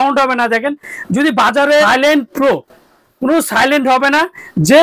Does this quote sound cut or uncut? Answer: cut